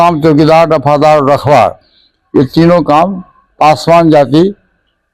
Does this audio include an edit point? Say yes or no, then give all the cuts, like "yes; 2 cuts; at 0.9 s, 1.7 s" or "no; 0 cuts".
no; 0 cuts